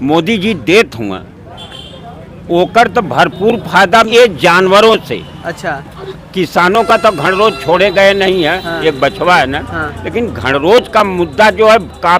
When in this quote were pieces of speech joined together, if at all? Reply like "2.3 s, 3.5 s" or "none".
4.1 s